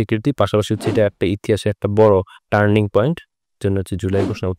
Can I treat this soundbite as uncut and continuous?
yes; 0 cuts

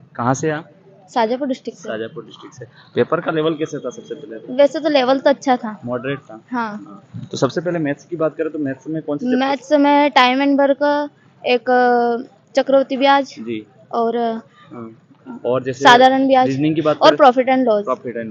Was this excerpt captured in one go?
yes; 0 cuts

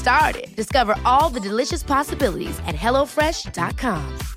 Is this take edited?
no; 0 cuts

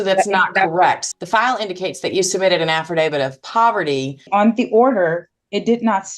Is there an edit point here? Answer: yes; 2 cuts; at 1.0 s, 4.3 s

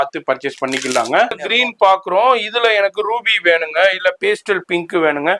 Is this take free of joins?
no; 1 cut; at 1.4 s

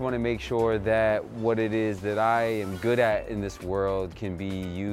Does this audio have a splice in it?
no; 0 cuts

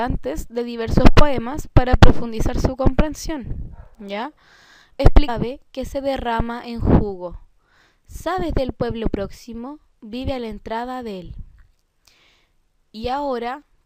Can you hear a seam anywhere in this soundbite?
no; 0 cuts

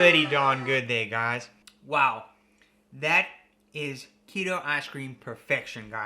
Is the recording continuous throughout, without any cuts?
no; 1 cut; at 1.5 s

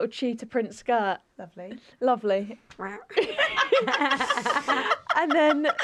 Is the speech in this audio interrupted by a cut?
no; 0 cuts

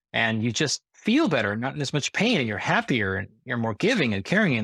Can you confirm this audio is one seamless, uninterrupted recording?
yes; 0 cuts

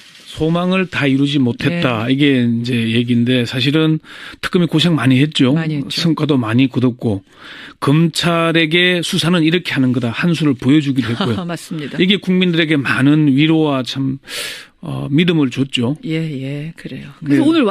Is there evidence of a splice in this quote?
yes; 1 cut; at 5.5 s

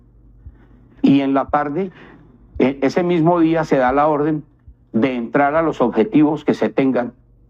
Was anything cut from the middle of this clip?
no; 0 cuts

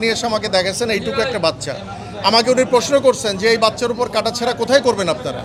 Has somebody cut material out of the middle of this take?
no; 0 cuts

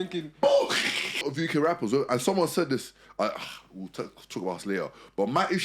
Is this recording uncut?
no; 1 cut; at 1.3 s

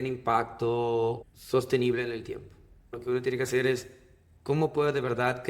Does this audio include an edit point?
yes; 2 cuts; at 1.3 s, 3.0 s

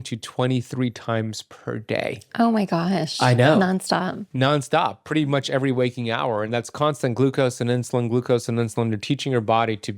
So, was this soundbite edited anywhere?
no; 0 cuts

